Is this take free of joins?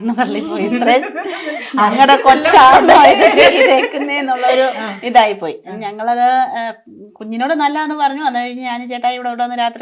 yes; 0 cuts

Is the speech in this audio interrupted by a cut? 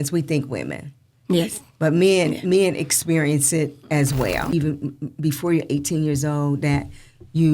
yes; 1 cut; at 4.4 s

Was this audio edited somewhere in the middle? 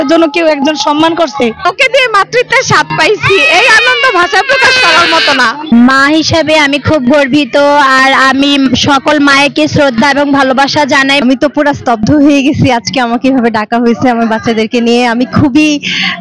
yes; 3 cuts; at 1.6 s, 5.7 s, 11.2 s

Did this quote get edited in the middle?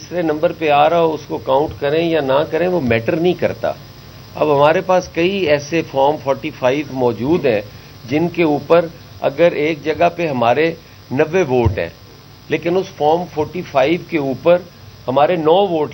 no; 0 cuts

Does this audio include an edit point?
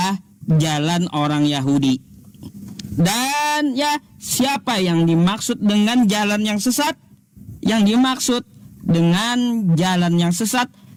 no; 0 cuts

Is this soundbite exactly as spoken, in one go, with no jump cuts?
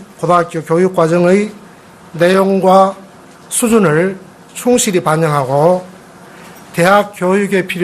no; 1 cut; at 5.3 s

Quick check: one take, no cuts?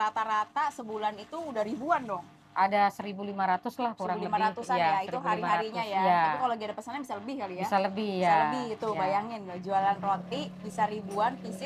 yes; 0 cuts

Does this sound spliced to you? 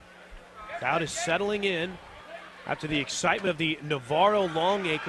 yes; 1 cut; at 3.8 s

